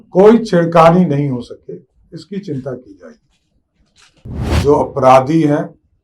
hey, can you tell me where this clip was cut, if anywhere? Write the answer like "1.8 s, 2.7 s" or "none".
4.6 s